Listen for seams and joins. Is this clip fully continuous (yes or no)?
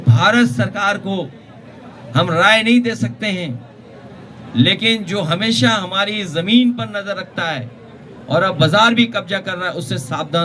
yes